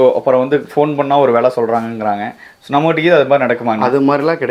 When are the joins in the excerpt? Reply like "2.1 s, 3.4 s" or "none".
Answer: none